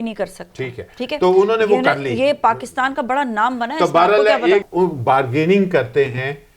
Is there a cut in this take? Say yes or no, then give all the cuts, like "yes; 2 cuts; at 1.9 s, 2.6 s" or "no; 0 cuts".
yes; 1 cut; at 4.7 s